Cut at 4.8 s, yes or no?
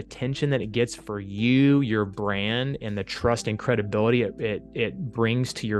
no